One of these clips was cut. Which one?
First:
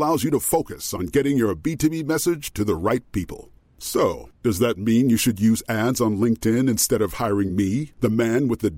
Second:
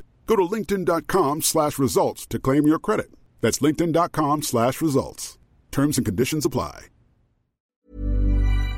second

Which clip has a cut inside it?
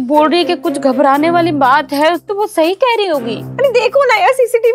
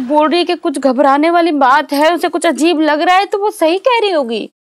first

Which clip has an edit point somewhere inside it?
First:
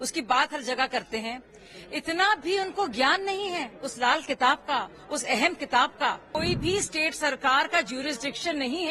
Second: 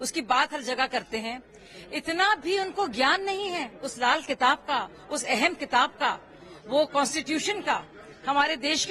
first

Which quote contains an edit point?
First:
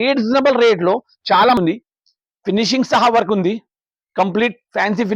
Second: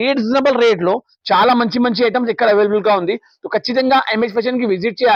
first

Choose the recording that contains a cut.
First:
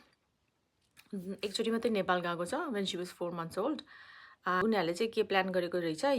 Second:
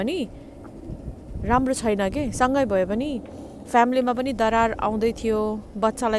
first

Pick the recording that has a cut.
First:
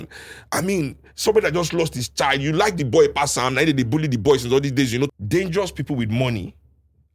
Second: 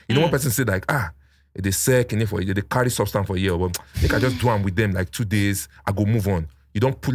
first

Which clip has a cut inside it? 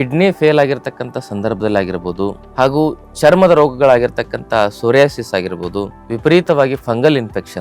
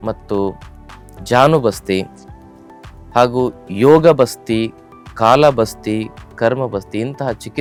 first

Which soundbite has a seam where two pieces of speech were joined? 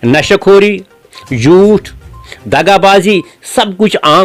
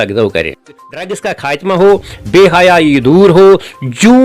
second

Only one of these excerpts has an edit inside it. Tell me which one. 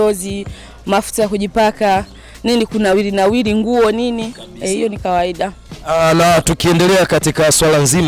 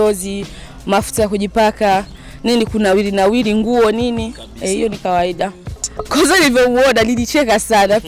second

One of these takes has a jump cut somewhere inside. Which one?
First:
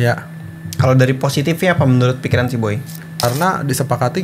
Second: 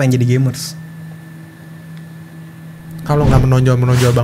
first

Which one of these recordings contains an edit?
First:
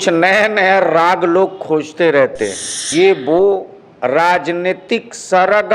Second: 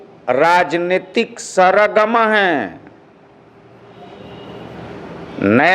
first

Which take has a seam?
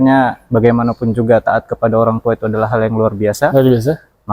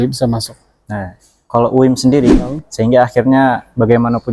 second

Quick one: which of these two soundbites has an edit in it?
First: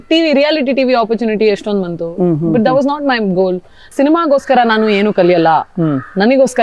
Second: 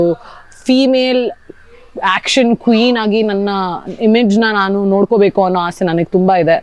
first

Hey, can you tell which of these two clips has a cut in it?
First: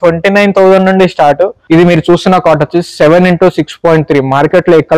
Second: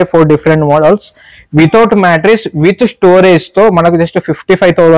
first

